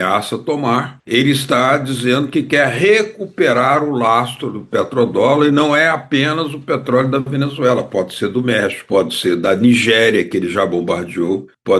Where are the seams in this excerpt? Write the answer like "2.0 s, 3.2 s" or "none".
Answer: 8.8 s

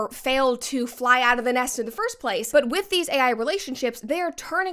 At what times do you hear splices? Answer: none

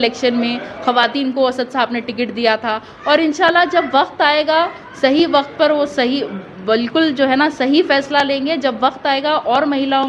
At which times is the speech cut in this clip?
none

